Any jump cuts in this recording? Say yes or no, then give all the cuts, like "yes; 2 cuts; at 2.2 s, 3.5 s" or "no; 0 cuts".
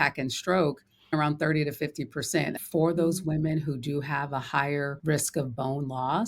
yes; 3 cuts; at 1.1 s, 2.6 s, 5.0 s